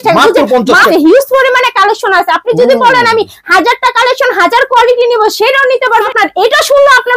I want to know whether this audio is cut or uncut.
cut